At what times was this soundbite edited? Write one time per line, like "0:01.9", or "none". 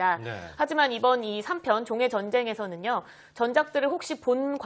0:03.7